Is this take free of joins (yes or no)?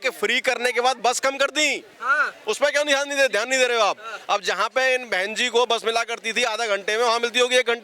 yes